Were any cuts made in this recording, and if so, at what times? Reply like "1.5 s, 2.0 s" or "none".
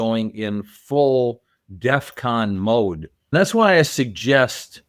3.3 s